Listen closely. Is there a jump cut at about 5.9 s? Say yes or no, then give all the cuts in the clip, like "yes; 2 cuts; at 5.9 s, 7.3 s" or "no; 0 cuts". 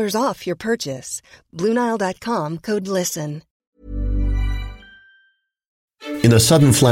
yes; 2 cuts; at 3.5 s, 5.9 s